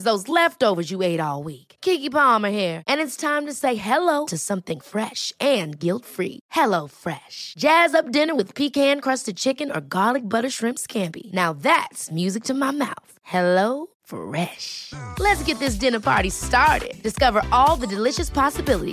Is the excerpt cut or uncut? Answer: uncut